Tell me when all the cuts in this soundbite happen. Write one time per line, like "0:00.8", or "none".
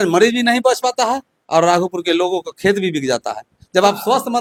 none

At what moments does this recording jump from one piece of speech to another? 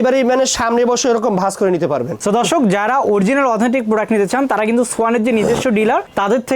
0:02.2

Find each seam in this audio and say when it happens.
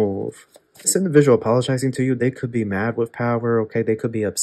0:00.9

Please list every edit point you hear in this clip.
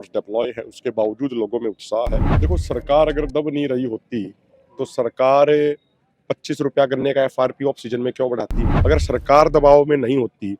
0:02.3
0:08.6

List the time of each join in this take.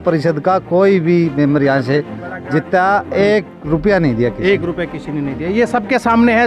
none

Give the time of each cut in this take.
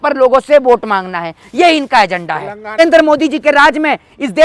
0:02.8

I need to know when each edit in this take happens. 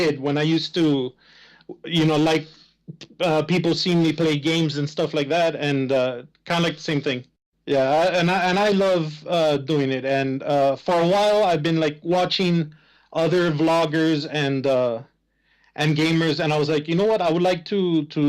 0:15.0

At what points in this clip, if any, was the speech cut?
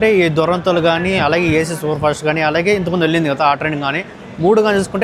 none

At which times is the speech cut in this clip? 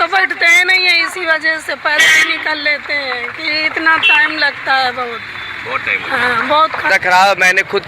0:06.9

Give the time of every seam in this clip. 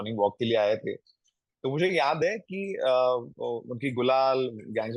none

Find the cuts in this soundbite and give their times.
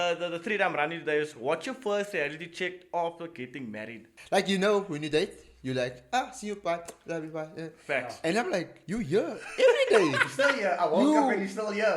0:04.1
0:08.8

